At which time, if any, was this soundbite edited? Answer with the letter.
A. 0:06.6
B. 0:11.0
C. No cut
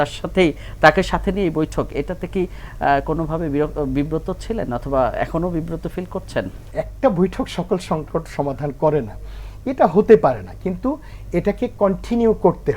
A